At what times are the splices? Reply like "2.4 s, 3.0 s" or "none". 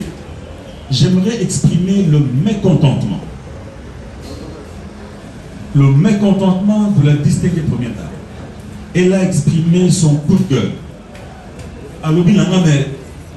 none

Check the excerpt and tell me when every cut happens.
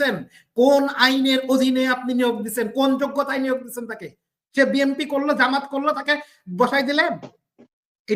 none

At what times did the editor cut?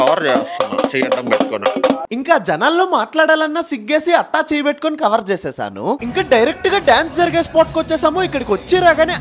6.0 s

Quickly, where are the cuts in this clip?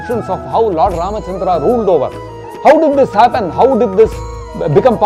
none

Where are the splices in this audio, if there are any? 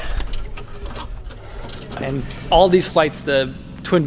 2.0 s

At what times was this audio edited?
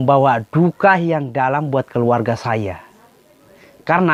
none

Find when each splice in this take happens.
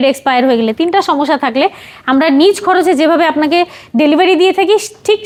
none

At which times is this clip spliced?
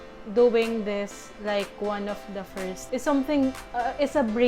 2.8 s

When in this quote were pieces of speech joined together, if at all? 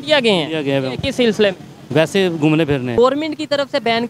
3.0 s

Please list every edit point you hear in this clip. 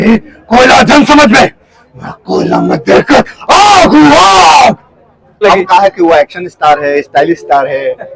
5.4 s

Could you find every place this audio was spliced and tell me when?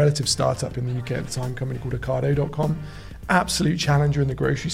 none

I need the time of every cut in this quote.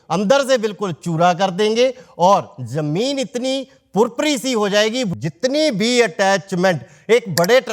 5.1 s

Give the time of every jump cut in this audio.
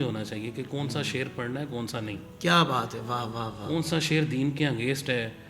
none

